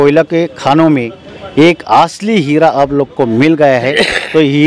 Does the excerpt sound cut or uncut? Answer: uncut